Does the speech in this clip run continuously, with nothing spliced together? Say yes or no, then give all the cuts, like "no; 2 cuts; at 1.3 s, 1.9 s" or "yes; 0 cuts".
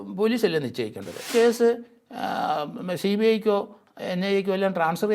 no; 1 cut; at 1.3 s